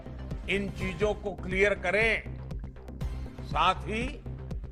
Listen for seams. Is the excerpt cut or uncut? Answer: uncut